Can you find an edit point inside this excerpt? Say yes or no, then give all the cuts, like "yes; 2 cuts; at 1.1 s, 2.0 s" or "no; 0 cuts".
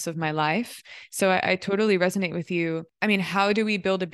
yes; 1 cut; at 2.9 s